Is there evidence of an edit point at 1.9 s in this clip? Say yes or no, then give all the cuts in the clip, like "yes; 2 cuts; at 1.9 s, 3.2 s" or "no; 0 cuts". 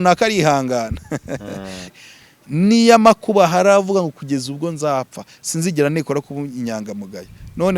yes; 1 cut; at 1.9 s